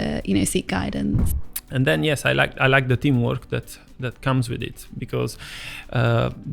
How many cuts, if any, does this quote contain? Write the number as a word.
one